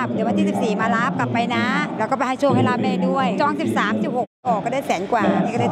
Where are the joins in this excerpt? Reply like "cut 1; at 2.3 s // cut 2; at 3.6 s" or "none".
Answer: none